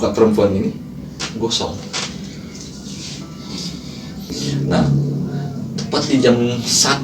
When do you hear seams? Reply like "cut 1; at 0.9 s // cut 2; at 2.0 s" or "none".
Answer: cut 1; at 4.3 s